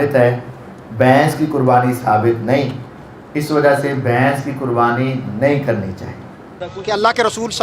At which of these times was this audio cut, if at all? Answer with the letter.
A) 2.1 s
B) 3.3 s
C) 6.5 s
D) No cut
C